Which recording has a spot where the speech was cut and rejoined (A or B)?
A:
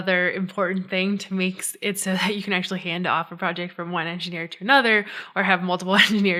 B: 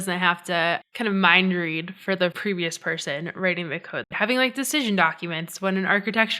B